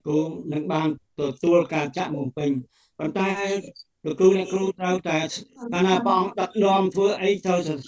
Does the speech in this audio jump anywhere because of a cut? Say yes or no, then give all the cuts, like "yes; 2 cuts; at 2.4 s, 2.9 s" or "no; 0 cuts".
no; 0 cuts